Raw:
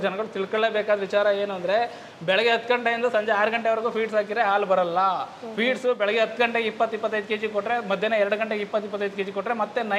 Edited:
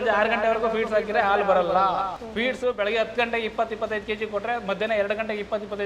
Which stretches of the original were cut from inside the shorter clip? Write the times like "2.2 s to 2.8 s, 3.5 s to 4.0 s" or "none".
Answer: none